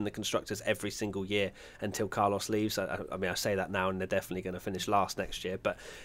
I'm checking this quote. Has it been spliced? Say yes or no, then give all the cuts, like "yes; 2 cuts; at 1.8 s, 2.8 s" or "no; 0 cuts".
no; 0 cuts